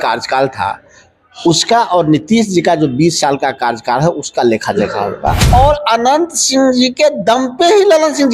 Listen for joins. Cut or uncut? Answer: cut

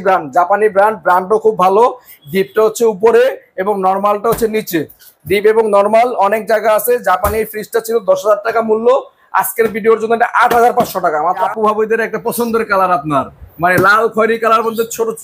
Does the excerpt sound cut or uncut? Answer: cut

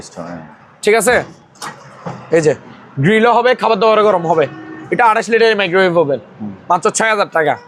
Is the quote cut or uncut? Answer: uncut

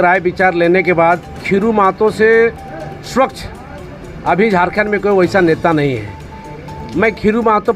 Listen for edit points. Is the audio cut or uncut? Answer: cut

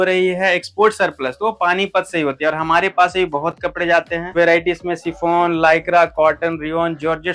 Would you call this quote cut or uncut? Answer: uncut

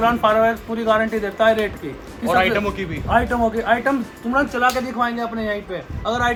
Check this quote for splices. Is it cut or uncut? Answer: uncut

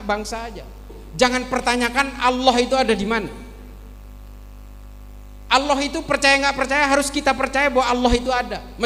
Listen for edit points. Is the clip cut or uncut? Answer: cut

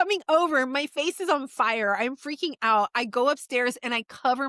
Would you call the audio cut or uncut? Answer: uncut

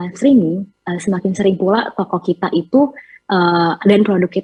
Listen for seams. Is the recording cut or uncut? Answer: uncut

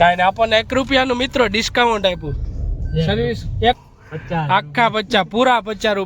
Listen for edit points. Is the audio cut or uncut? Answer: cut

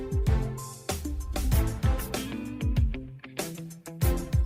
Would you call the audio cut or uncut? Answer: uncut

